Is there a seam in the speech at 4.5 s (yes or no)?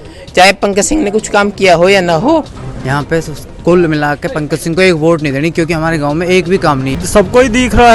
no